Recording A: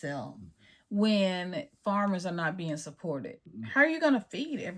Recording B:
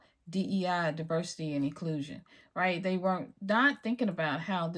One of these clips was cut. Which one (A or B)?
A